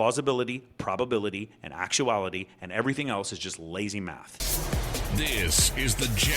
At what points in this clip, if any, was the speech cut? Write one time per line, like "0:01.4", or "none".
0:04.3

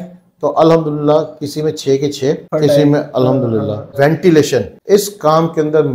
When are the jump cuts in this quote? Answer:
0:02.4
0:03.9
0:04.7

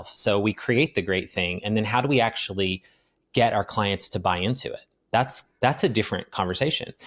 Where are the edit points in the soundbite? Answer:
none

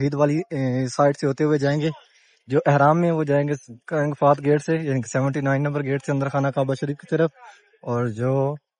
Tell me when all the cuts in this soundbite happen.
none

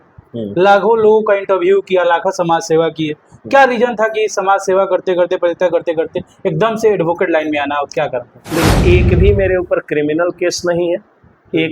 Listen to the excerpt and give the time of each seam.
0:08.7

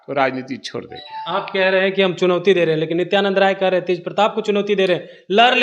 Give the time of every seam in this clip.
none

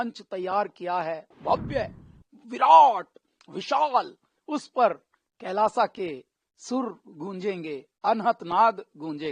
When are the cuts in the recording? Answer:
0:01.3

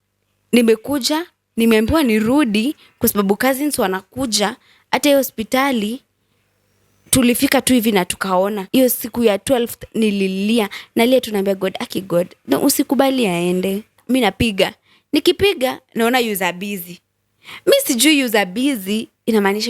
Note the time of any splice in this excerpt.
0:08.6
0:14.0

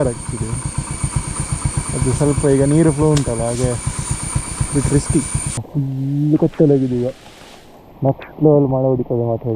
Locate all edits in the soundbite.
0:05.6

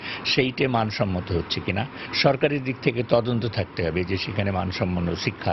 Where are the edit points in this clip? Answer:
none

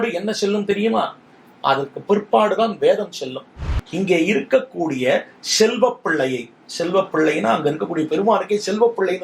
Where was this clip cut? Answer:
0:03.7

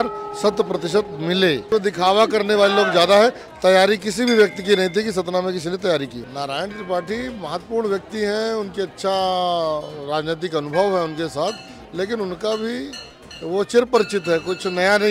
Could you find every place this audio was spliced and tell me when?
0:01.7
0:06.2

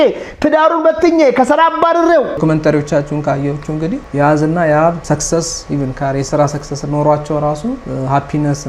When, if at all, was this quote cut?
0:02.4
0:04.0
0:05.0
0:07.8

